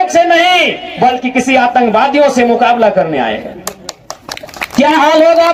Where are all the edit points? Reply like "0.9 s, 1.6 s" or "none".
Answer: none